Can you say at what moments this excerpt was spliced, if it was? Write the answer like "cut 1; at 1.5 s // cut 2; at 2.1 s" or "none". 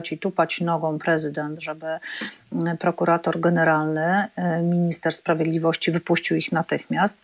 none